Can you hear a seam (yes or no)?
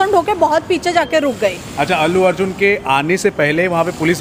no